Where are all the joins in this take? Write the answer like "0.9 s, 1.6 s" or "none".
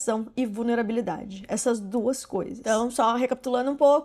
none